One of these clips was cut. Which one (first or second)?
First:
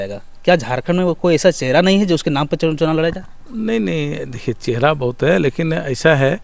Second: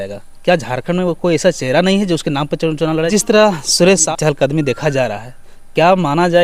second